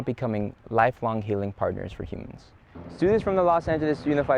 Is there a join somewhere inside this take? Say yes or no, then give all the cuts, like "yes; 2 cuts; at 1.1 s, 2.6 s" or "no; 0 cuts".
yes; 1 cut; at 2.9 s